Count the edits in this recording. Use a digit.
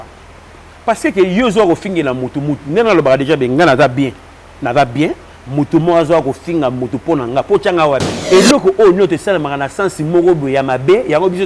1